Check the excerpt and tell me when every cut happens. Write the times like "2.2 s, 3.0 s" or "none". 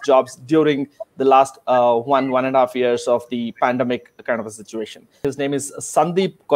5.2 s